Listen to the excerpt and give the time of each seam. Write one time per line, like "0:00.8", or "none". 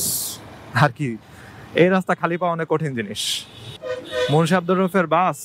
0:03.7

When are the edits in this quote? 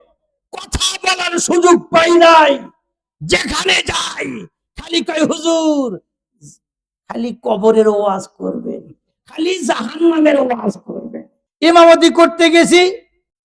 0:11.4

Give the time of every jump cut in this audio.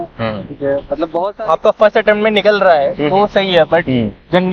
0:01.2

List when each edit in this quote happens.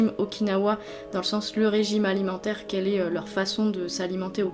none

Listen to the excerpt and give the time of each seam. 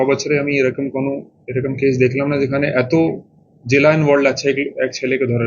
none

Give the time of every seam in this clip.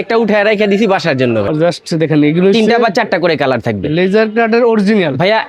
0:01.5

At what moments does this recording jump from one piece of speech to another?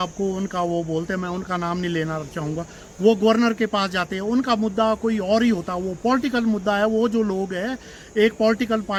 none

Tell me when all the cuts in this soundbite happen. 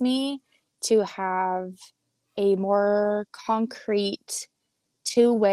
none

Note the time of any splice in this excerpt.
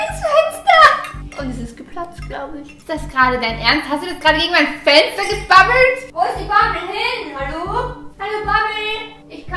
0:06.0

